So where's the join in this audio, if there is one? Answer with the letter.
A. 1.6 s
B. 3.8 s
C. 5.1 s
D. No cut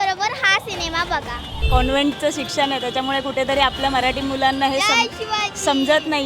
A